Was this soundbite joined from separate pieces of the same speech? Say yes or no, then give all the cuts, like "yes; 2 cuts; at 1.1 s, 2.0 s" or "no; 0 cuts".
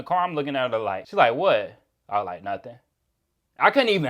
yes; 1 cut; at 1.0 s